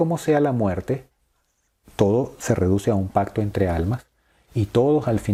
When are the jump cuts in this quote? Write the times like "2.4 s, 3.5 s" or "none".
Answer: none